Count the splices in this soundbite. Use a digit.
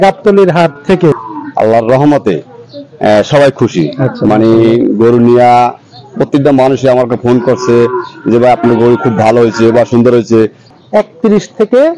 2